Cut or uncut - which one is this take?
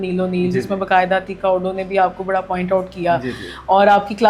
uncut